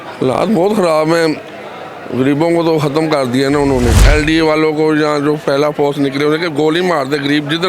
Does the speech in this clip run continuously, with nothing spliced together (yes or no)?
no